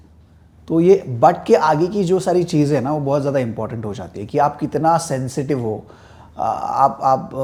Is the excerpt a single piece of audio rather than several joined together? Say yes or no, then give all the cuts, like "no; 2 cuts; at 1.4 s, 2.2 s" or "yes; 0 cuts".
yes; 0 cuts